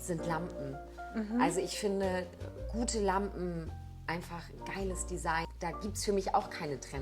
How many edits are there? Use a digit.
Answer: 1